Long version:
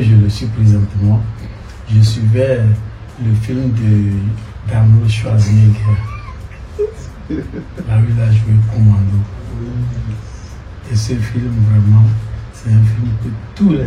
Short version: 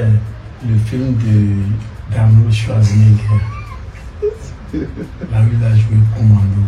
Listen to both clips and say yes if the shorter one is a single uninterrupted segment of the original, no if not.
yes